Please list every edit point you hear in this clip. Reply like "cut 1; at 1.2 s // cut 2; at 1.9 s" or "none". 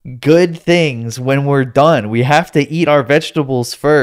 none